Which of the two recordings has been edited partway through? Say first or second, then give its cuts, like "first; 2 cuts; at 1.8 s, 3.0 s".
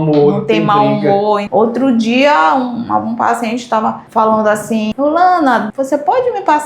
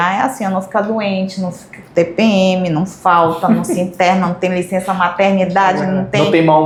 first; 3 cuts; at 1.4 s, 4.9 s, 5.7 s